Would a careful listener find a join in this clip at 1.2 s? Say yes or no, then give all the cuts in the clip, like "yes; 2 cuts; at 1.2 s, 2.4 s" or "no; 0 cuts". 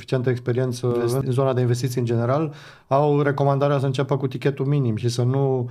yes; 1 cut; at 1.2 s